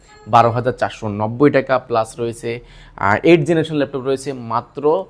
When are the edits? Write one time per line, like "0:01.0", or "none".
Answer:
none